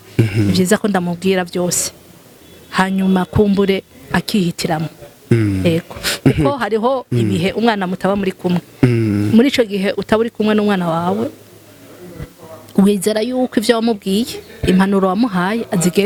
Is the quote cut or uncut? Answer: uncut